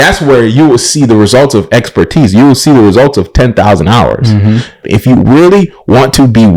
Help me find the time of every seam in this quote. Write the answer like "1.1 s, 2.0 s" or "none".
4.8 s

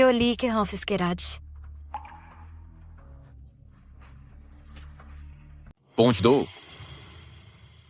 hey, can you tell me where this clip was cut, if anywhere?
5.8 s

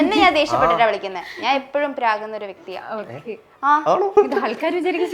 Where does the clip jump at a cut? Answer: 4.1 s

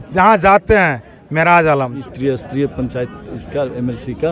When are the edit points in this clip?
2.0 s

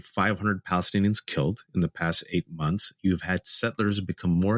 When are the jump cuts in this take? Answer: none

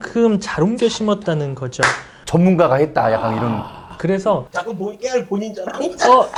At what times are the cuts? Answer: none

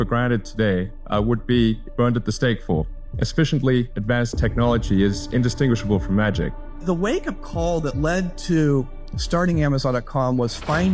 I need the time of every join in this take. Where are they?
1.0 s, 1.8 s, 3.0 s, 3.9 s, 6.7 s

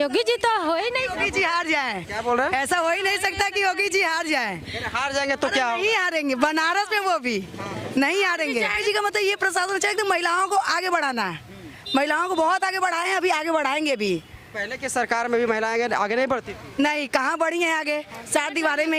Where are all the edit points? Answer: none

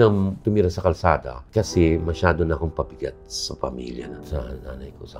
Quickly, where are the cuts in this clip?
none

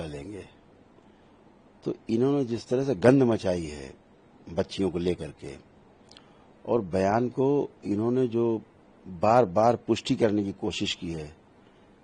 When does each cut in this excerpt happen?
none

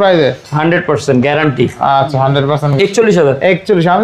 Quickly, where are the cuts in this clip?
2.8 s

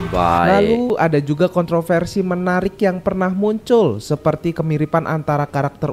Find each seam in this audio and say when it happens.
0.9 s

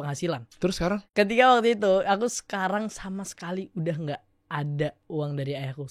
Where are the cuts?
1.1 s, 5.0 s

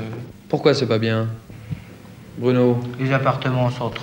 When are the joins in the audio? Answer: none

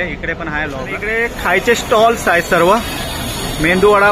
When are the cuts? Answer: 0.9 s

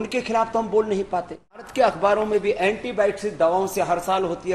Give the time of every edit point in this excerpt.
1.7 s

